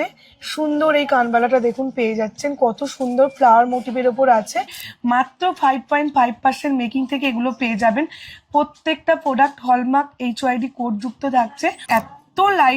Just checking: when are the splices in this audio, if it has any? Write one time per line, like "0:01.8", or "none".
0:04.8
0:11.8